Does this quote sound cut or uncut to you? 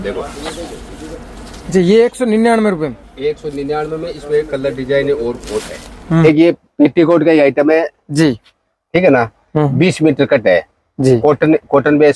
uncut